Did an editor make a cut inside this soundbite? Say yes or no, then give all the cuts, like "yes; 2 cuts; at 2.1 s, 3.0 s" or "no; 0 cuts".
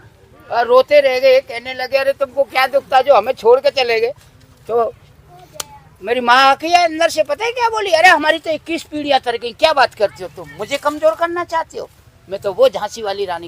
no; 0 cuts